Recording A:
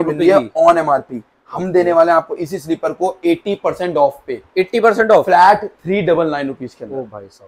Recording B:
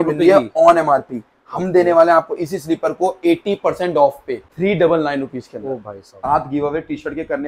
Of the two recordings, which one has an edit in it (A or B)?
B